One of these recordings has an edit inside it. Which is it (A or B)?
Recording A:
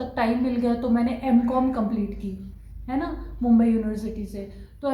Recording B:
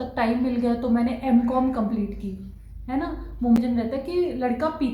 B